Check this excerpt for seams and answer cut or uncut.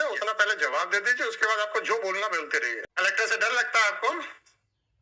cut